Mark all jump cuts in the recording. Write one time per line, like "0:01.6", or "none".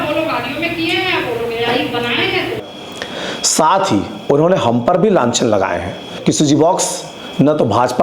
0:02.7
0:06.1